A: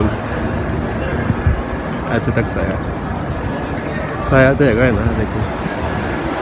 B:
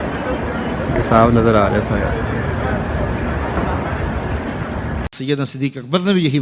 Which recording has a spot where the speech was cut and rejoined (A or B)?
B